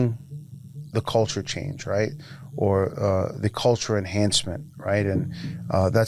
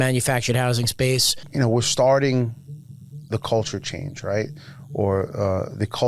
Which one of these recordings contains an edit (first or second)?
second